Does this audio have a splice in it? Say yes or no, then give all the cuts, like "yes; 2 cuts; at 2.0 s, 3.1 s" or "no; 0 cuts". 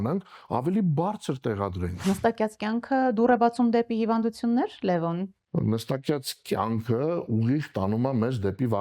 yes; 2 cuts; at 1.9 s, 5.4 s